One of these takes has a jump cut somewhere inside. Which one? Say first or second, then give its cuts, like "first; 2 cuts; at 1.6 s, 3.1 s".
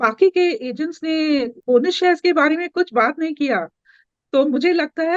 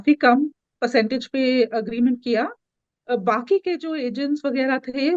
first; 1 cut; at 1.5 s